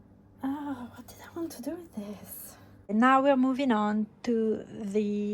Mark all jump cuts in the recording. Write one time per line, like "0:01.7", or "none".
0:02.9